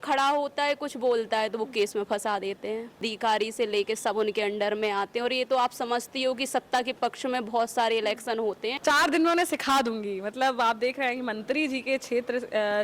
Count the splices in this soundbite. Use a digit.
2